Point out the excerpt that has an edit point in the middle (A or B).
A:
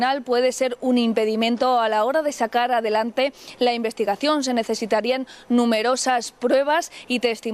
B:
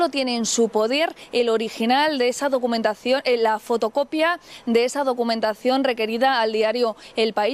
B